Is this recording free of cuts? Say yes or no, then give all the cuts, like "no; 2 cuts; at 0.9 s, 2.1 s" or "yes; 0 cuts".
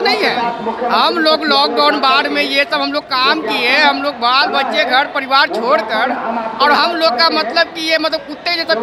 yes; 0 cuts